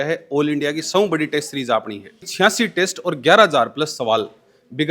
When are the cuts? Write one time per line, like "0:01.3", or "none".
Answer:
0:02.3